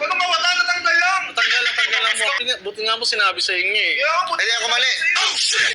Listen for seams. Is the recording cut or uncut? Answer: cut